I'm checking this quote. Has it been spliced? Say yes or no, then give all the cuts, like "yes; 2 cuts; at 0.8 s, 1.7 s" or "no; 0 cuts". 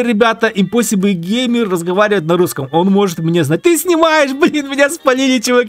no; 0 cuts